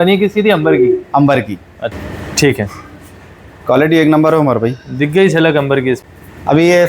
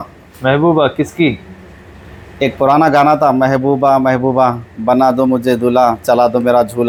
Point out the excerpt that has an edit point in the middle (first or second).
first